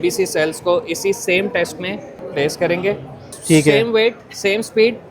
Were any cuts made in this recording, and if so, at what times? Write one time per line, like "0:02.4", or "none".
0:02.2
0:03.3